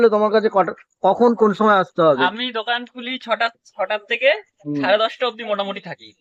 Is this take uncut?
yes; 0 cuts

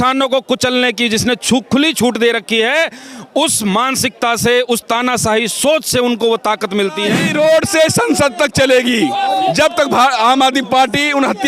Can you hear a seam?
yes; 1 cut; at 7.2 s

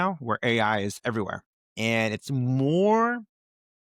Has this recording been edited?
no; 0 cuts

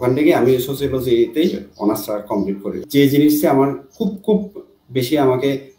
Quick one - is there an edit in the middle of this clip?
yes; 1 cut; at 2.8 s

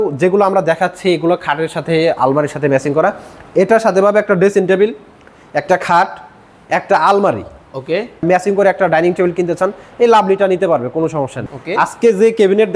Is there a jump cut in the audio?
yes; 2 cuts; at 8.2 s, 11.4 s

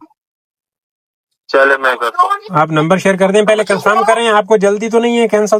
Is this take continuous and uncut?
yes; 0 cuts

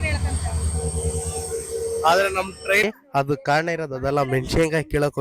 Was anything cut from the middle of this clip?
yes; 1 cut; at 2.8 s

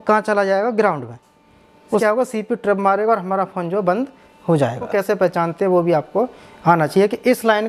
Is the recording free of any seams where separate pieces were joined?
no; 2 cuts; at 2.0 s, 4.9 s

